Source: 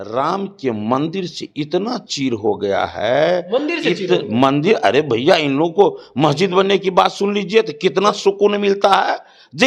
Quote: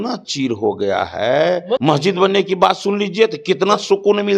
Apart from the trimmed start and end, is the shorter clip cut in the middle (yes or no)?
yes